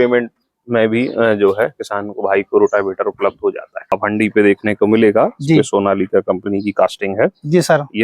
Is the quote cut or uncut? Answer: cut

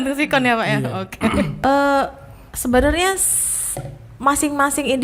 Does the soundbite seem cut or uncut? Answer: cut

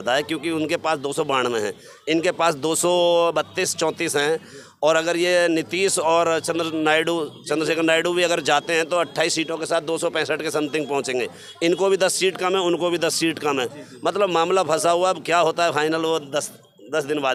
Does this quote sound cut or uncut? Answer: uncut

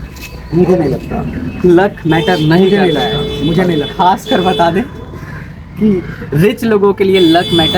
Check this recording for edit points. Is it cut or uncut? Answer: uncut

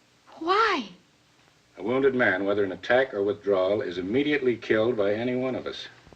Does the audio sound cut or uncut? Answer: uncut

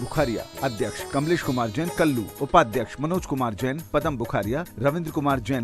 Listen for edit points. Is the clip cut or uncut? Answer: cut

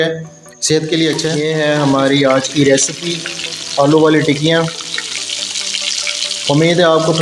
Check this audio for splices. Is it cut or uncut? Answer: cut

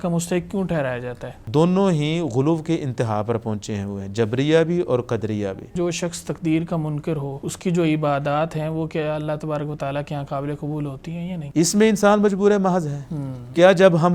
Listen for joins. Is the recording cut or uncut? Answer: cut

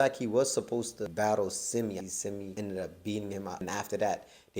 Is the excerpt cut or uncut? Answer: cut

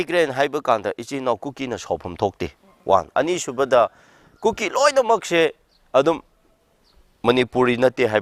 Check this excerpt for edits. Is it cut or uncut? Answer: uncut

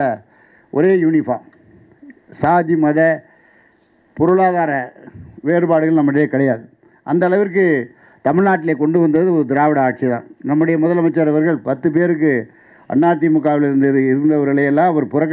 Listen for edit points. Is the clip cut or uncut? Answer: uncut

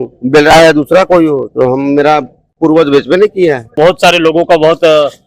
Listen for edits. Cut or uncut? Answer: cut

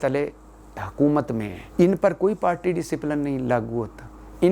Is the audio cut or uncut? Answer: cut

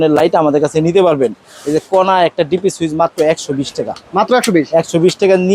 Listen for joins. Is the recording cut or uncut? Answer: uncut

